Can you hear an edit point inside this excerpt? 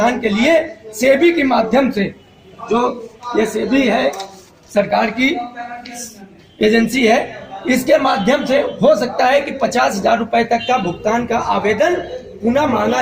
no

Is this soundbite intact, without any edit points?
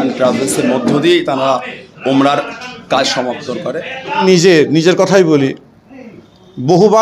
no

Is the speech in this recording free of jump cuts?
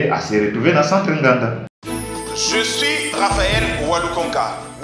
no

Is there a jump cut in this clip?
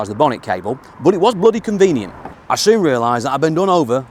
yes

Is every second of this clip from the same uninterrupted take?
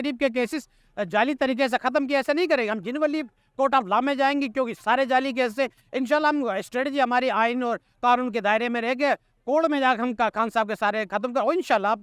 yes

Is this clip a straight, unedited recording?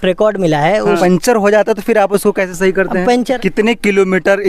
no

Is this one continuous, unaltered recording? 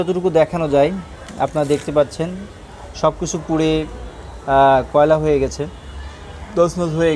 yes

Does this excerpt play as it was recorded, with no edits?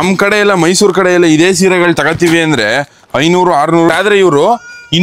no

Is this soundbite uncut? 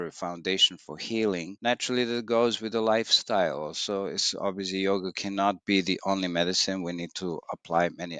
yes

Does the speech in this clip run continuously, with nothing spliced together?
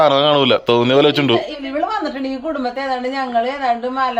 no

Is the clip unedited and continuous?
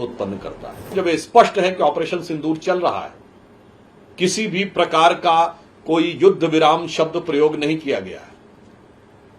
no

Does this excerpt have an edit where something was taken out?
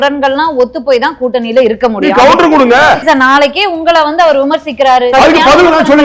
yes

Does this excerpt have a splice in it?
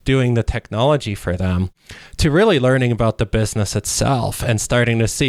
no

